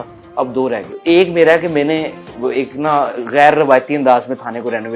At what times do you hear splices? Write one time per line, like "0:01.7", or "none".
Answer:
0:00.9